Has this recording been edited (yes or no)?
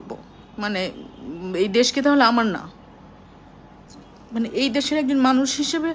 yes